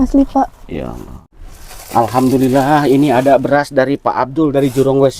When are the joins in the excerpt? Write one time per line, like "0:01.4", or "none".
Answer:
0:01.3